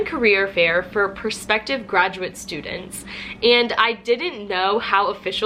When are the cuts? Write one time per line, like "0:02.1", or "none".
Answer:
none